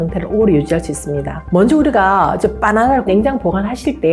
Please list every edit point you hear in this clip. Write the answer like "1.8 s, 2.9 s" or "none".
3.1 s